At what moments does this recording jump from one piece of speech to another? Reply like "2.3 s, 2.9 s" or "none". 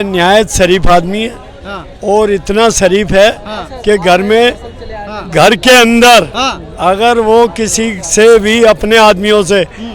none